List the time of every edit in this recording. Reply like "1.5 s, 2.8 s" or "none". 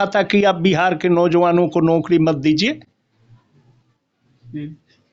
none